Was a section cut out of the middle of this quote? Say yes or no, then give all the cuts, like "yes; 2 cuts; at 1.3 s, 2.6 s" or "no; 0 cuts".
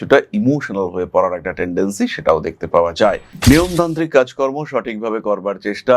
yes; 1 cut; at 3.3 s